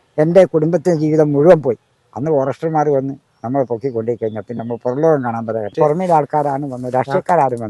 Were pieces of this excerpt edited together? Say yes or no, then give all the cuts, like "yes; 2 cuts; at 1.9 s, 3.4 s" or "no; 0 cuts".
yes; 1 cut; at 5.7 s